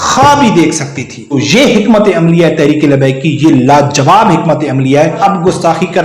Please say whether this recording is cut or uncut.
cut